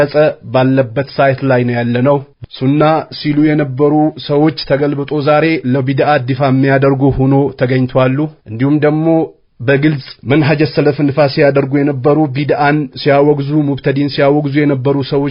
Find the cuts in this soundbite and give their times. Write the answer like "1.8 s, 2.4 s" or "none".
2.4 s